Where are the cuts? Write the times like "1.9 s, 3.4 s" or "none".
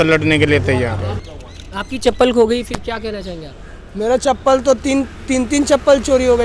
none